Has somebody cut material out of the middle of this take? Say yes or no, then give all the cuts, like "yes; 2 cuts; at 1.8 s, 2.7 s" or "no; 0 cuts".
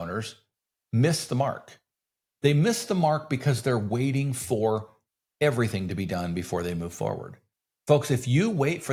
no; 0 cuts